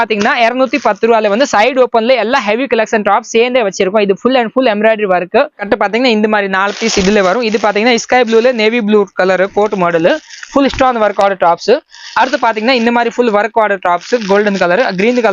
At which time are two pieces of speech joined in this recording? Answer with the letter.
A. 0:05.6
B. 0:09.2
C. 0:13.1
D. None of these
A